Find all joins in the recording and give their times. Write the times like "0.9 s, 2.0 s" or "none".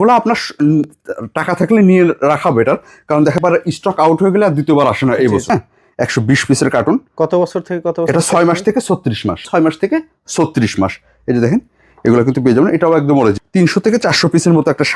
3.4 s, 5.4 s, 9.5 s, 13.4 s